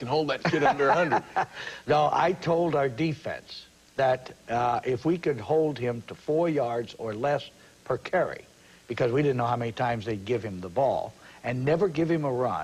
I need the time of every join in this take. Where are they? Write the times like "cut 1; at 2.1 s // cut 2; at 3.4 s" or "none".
cut 1; at 11.4 s

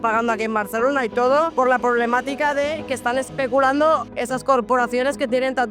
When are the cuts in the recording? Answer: cut 1; at 1.5 s // cut 2; at 4.1 s

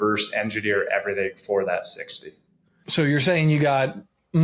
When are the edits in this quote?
none

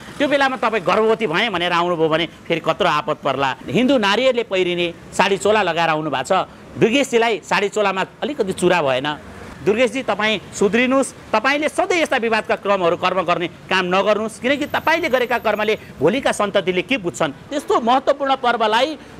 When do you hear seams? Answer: cut 1; at 3.6 s // cut 2; at 9.5 s // cut 3; at 17.5 s

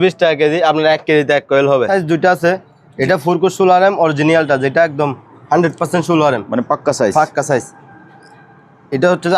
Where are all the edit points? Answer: cut 1; at 1.9 s

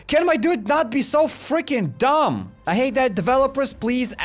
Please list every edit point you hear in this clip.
none

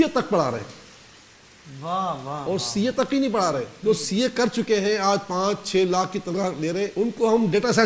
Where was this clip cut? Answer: cut 1; at 3.7 s // cut 2; at 6.9 s

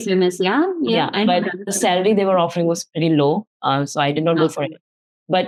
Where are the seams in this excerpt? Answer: none

